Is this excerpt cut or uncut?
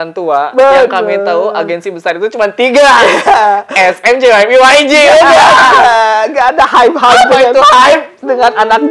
uncut